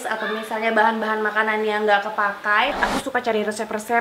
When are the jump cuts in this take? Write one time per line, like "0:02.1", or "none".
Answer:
0:02.8